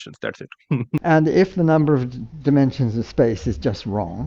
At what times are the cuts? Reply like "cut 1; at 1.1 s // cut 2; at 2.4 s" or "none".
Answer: cut 1; at 1.0 s